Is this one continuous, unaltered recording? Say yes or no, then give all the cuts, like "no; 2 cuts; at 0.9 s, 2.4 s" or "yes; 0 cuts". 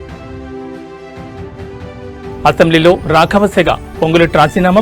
yes; 0 cuts